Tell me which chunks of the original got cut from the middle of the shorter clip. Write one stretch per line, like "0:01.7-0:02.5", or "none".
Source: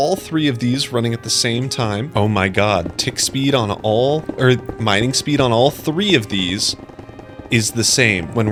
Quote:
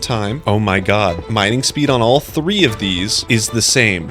0:02.9-0:04.7
0:06.7-0:07.4